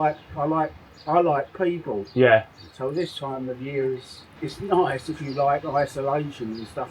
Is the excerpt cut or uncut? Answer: uncut